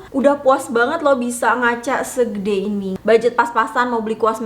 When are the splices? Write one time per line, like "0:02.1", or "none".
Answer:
0:03.0